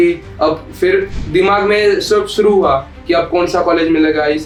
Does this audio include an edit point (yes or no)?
no